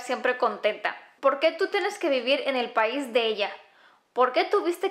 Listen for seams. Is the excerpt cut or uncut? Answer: cut